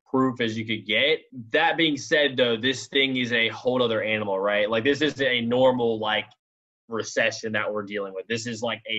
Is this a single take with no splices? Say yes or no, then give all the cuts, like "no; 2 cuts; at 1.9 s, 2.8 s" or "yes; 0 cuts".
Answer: yes; 0 cuts